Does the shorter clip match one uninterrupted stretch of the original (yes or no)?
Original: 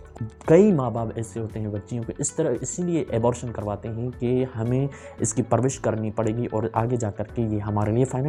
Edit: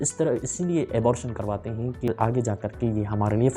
no